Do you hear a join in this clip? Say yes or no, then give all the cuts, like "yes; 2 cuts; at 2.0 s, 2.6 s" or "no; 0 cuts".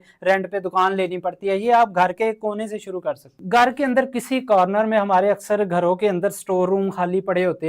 yes; 1 cut; at 3.3 s